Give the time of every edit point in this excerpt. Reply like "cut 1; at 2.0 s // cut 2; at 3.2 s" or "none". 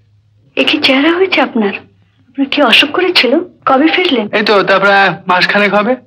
cut 1; at 3.5 s